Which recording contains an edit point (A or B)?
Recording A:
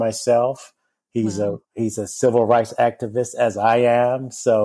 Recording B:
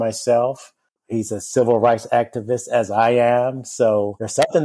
B